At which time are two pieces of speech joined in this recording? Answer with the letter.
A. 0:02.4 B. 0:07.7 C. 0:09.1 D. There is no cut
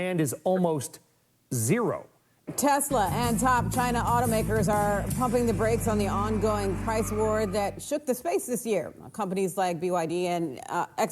A